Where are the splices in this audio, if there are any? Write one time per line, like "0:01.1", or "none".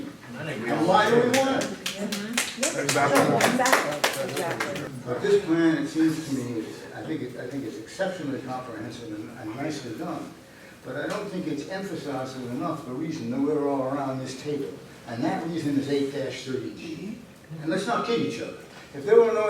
0:04.8